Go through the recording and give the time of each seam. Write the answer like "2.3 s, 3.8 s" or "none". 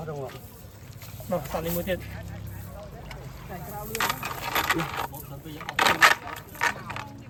none

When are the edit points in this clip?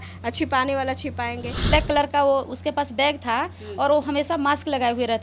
1.7 s

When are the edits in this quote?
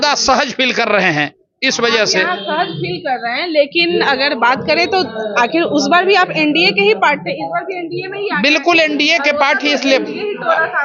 none

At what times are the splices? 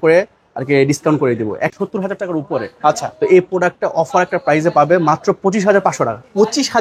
1.7 s

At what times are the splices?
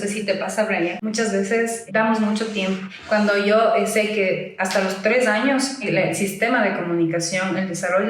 1.0 s, 1.8 s, 2.9 s, 5.8 s

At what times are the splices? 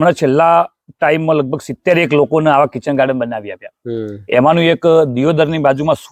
none

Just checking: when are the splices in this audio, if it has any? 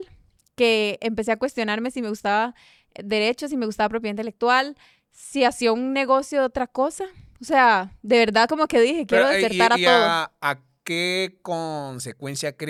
none

